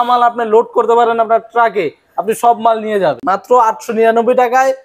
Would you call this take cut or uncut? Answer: cut